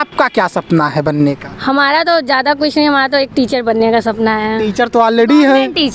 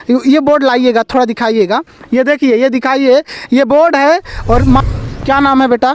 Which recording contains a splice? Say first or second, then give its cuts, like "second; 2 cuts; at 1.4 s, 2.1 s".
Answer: second; 1 cut; at 4.8 s